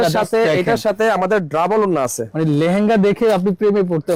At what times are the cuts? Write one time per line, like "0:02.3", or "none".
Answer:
none